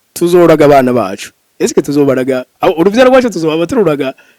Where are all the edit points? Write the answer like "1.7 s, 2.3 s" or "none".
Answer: 2.5 s